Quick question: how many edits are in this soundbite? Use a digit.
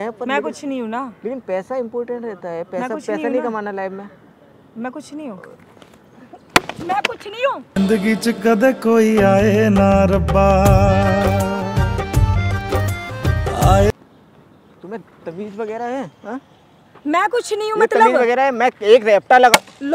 0